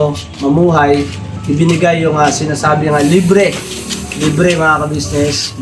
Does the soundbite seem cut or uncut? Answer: uncut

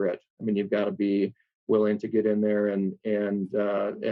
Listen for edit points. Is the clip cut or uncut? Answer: uncut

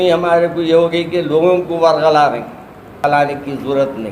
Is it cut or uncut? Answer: cut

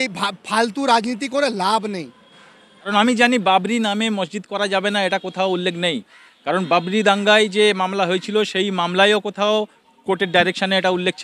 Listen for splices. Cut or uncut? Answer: cut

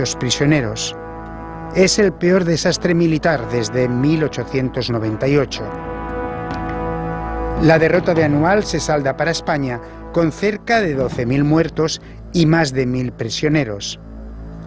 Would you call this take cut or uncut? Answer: uncut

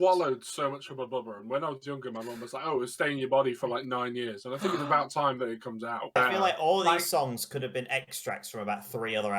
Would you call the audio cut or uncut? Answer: cut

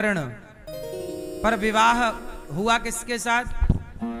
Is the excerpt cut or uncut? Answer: uncut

